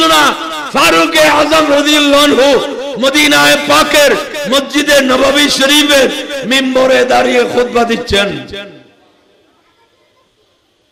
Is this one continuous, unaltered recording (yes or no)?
yes